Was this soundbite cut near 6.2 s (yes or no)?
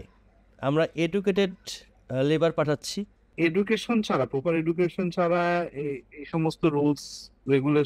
no